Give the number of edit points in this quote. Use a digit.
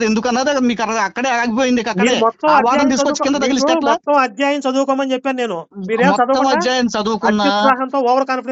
0